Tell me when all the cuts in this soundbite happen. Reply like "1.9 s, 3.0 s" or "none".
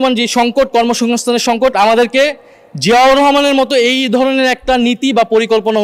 none